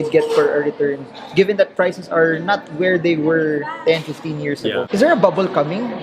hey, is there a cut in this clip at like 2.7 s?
no; 1 cut; at 4.9 s

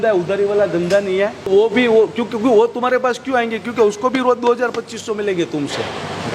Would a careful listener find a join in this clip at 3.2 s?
no; 1 cut; at 1.5 s

